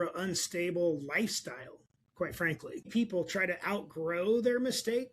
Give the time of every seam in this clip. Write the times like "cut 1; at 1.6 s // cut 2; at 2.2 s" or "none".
cut 1; at 2.9 s